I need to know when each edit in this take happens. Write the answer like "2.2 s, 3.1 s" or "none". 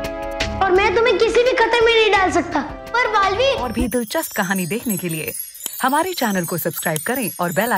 3.7 s

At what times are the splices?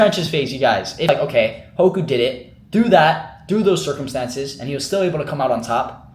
1.1 s

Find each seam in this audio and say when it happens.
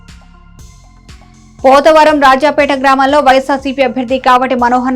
none

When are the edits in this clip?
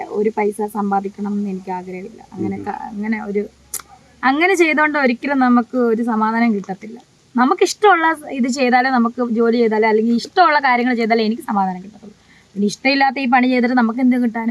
none

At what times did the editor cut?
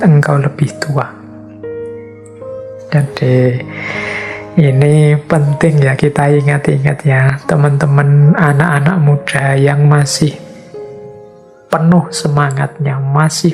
none

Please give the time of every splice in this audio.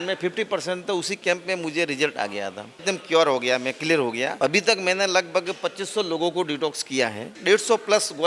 2.8 s, 4.3 s, 7.4 s

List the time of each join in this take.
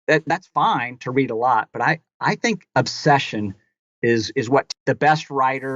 4.7 s

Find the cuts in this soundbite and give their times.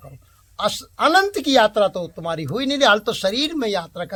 none

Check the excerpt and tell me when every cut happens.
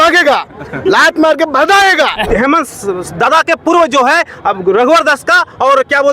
2.3 s

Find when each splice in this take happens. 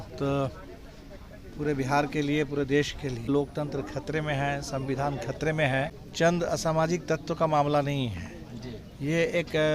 3.3 s, 6.0 s

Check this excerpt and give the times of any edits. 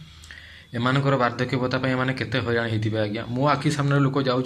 none

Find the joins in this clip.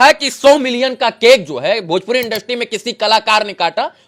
none

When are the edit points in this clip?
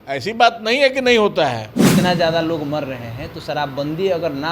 1.9 s

